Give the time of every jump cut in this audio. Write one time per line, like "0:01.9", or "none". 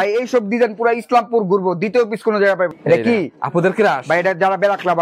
0:02.7

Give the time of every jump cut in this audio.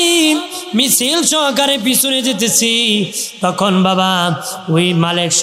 none

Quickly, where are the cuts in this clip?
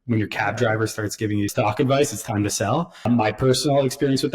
0:01.5
0:03.1

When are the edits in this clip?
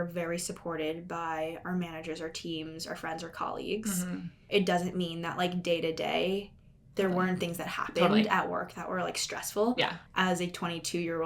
0:04.4
0:10.0

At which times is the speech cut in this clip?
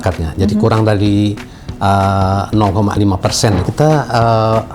0:03.7

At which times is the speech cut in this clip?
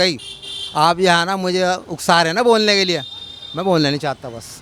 none

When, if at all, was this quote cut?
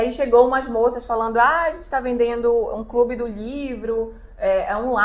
none

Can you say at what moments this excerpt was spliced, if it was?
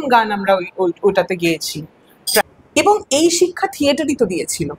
0:02.4

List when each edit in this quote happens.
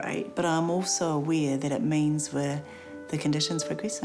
none

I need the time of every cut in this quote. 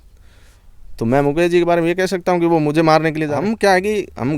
0:03.4

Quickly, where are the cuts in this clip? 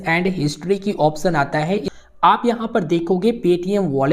0:01.9

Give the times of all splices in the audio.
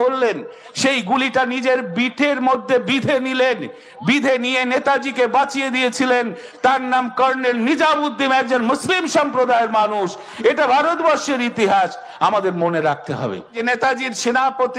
0:13.6

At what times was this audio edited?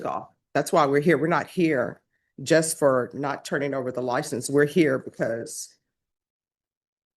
none

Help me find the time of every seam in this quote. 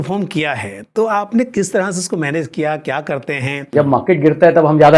0:03.7

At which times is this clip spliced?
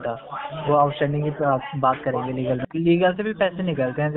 0:02.6

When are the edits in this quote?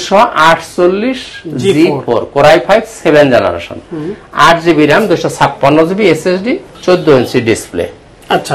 none

